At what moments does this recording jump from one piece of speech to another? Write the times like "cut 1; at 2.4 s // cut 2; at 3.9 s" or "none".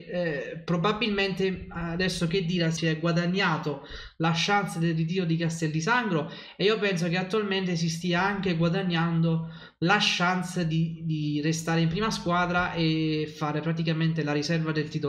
none

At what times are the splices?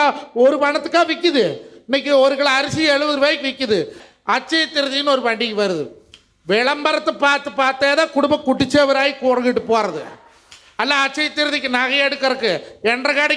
cut 1; at 4.0 s

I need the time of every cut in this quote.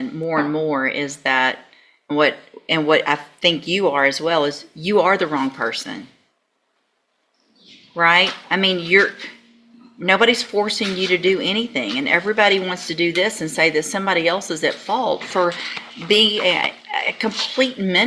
cut 1; at 8.6 s

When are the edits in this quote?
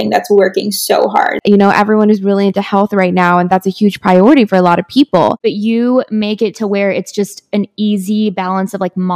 cut 1; at 1.4 s // cut 2; at 5.4 s

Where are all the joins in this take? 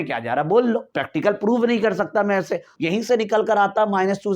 cut 1; at 0.9 s // cut 2; at 2.7 s

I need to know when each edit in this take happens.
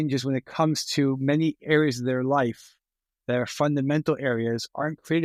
none

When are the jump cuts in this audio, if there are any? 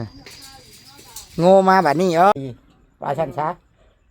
cut 1; at 2.3 s

